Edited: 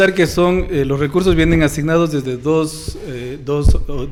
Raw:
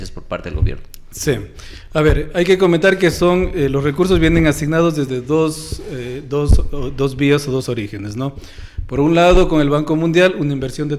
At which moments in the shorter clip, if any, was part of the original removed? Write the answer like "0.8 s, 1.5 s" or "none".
none